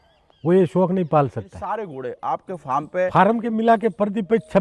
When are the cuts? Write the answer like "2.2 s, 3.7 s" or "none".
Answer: 1.9 s